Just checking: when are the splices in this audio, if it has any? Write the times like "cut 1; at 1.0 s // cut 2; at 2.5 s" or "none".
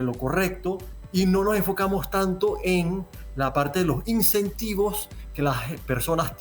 cut 1; at 0.9 s